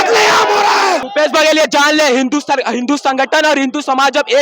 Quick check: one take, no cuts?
no; 1 cut; at 1.0 s

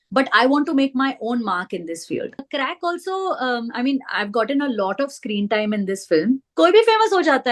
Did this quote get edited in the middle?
yes; 2 cuts; at 2.4 s, 6.5 s

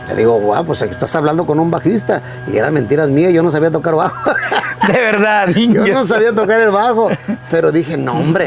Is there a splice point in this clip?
no; 0 cuts

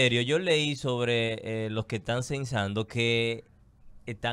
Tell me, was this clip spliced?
no; 0 cuts

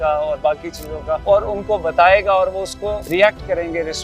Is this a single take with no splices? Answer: no; 2 cuts; at 1.2 s, 3.0 s

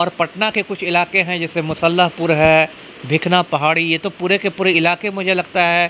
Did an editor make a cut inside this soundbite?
no; 0 cuts

